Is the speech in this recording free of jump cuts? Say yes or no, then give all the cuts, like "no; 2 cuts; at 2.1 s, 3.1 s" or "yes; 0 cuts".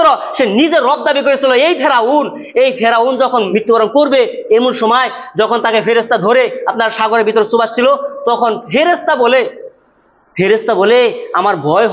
no; 1 cut; at 3.5 s